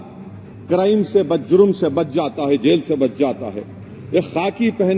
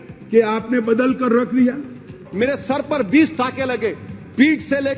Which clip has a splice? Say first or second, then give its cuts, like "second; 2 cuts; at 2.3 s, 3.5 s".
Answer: second; 1 cut; at 2.2 s